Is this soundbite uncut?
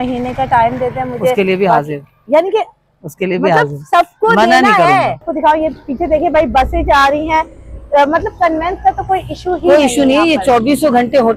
no; 1 cut; at 5.3 s

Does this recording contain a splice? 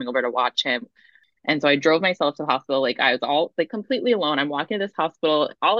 yes; 1 cut; at 1.2 s

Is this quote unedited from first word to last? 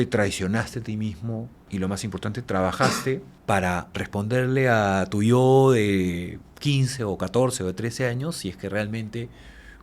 no; 3 cuts; at 1.6 s, 3.3 s, 3.9 s

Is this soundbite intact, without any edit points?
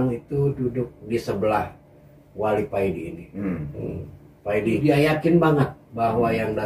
no; 1 cut; at 4.8 s

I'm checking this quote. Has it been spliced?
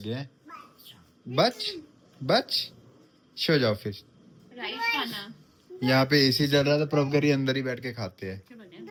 no; 0 cuts

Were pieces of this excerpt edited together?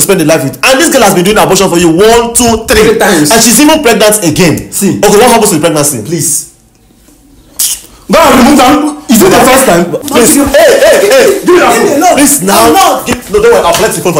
yes; 1 cut; at 10.0 s

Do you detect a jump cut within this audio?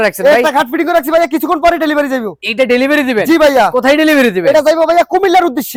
no; 0 cuts

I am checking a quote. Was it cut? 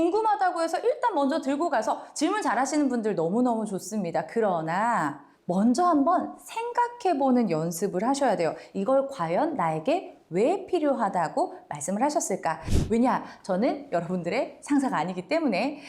yes; 1 cut; at 12.7 s

